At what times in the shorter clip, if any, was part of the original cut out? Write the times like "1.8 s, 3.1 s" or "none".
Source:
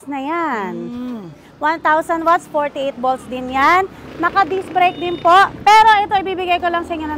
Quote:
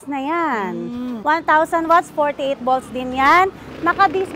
1.2 s

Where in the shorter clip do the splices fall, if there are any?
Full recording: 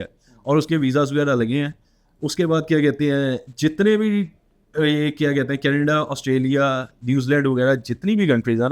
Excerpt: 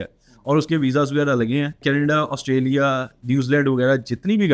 1.8 s

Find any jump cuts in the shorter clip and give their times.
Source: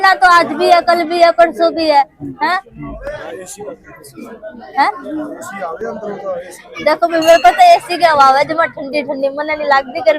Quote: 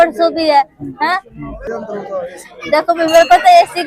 1.6 s

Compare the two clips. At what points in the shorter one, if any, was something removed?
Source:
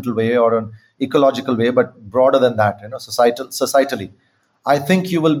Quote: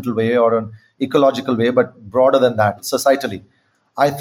2.8 s

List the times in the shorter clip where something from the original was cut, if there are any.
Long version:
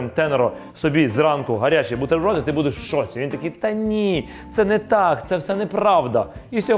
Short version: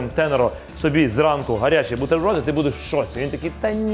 none

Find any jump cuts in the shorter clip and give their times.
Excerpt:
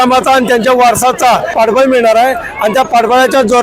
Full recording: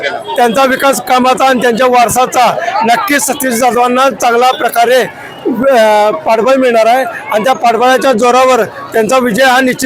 1.5 s

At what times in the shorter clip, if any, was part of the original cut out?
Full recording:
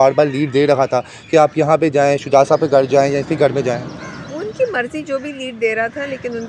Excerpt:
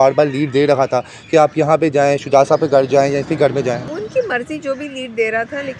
3.9 s

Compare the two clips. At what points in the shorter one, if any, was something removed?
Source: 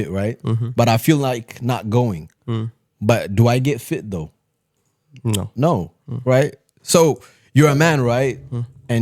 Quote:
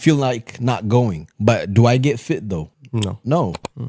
1.2 s, 2.8 s

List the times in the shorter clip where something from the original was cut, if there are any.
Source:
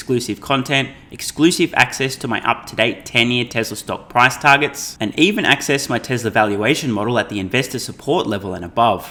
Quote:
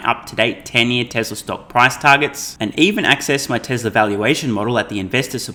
none

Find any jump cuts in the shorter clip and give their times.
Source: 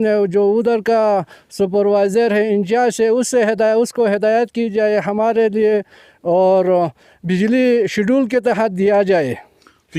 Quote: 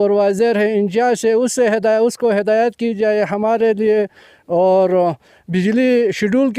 none

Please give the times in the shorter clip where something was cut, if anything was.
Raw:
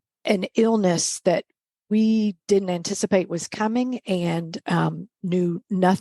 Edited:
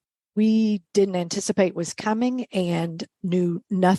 3.0 s

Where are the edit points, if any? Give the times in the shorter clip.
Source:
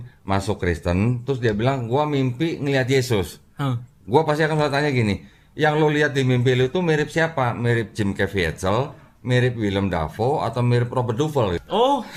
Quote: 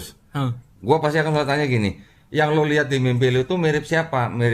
none

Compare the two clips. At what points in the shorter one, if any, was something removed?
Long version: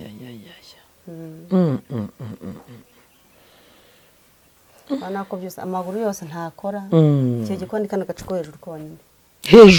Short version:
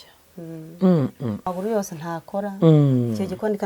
1.5 s

